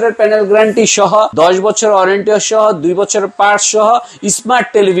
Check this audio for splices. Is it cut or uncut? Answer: cut